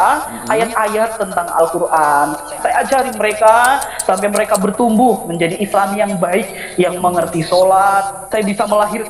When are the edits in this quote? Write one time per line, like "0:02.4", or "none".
0:02.5
0:08.2